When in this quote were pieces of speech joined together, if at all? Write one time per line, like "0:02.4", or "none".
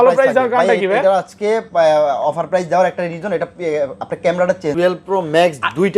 0:04.7